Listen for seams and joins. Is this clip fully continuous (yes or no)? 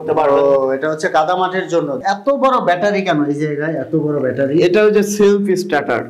no